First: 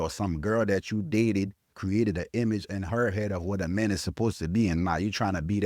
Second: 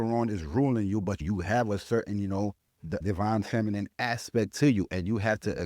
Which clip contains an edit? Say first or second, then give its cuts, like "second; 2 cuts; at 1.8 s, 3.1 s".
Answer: second; 2 cuts; at 1.2 s, 2.9 s